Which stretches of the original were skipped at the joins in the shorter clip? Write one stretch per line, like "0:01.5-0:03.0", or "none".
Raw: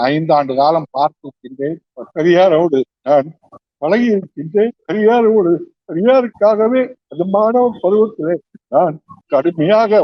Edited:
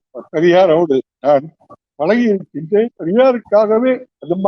0:04.8-0:05.8